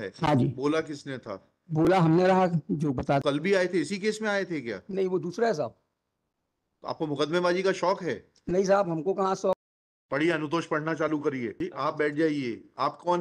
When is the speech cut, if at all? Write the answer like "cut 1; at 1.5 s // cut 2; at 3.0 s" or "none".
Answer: cut 1; at 3.2 s // cut 2; at 9.6 s // cut 3; at 11.5 s